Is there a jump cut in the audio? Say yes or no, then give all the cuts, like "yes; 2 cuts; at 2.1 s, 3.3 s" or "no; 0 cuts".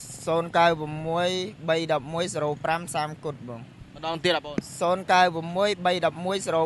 no; 0 cuts